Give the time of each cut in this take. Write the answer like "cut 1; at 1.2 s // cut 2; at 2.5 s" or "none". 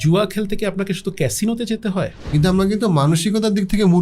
cut 1; at 2.2 s